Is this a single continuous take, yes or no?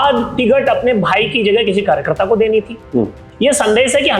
no